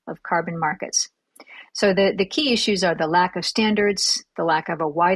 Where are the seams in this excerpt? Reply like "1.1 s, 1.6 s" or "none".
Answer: none